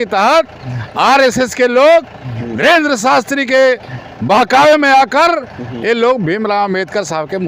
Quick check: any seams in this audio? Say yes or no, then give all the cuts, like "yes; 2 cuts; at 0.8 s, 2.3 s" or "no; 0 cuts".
no; 0 cuts